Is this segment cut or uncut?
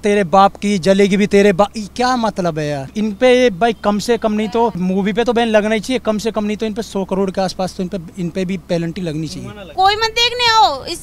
cut